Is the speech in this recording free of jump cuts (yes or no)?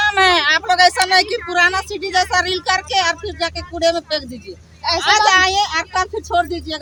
yes